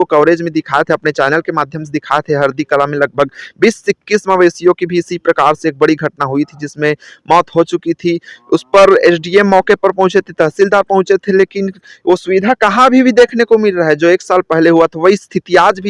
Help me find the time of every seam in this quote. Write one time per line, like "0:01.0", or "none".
none

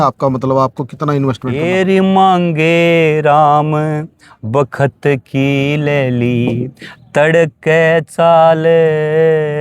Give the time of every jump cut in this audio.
0:01.5

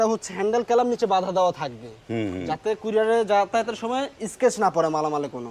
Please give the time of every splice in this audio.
none

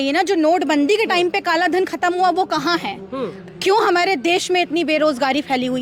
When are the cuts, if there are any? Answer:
none

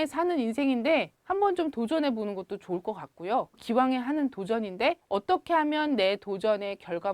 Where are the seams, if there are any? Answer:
0:01.2
0:03.6
0:05.0

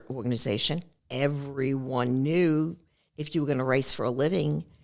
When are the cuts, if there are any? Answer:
0:01.0

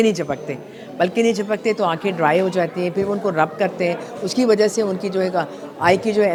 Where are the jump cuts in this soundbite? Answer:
none

